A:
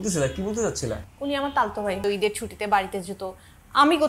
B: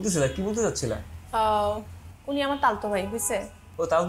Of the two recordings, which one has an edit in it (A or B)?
A